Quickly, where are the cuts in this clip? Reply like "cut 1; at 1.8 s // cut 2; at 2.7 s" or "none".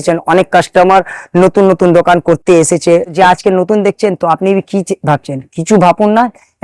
cut 1; at 3.1 s